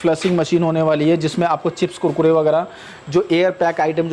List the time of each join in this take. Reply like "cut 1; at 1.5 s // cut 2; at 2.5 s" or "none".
none